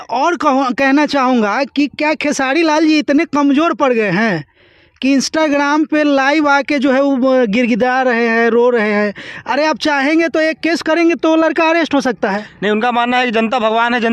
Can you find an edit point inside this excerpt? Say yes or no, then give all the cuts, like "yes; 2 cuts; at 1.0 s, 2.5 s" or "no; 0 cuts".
no; 0 cuts